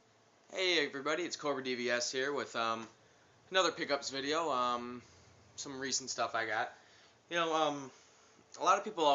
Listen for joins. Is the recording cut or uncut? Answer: uncut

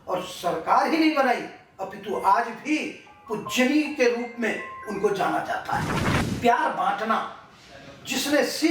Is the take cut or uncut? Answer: cut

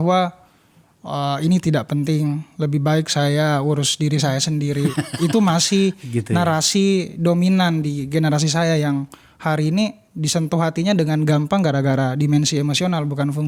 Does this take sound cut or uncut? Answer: uncut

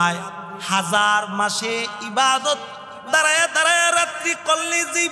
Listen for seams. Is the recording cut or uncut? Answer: uncut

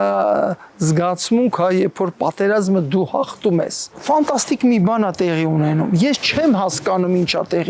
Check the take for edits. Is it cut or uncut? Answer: cut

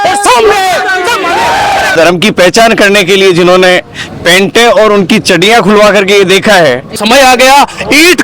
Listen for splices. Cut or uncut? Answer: cut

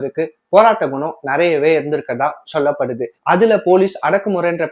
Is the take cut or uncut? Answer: cut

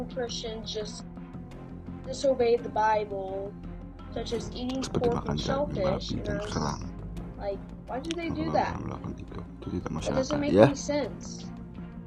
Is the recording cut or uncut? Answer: cut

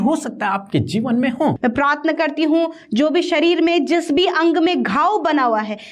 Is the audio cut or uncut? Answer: cut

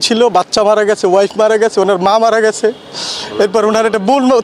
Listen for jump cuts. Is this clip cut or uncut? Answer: uncut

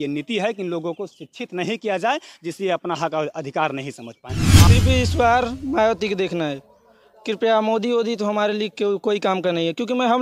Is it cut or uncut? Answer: cut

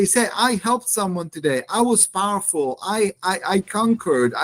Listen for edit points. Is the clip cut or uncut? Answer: uncut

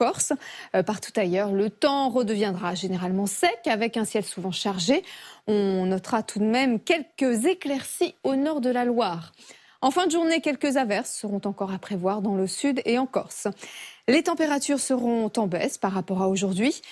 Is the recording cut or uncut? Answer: uncut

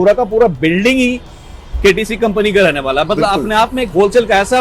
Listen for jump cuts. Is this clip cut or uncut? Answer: uncut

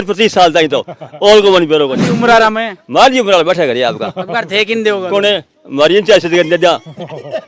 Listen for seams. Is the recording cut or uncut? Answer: cut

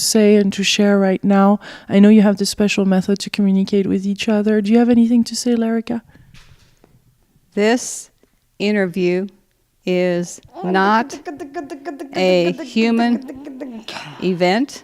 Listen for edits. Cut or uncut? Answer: cut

